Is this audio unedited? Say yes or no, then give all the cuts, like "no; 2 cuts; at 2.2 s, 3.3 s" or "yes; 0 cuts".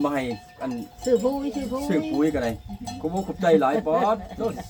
yes; 0 cuts